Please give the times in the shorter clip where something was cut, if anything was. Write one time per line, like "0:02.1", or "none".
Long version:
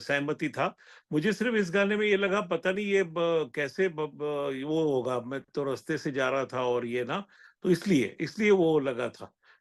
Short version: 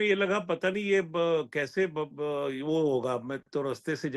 none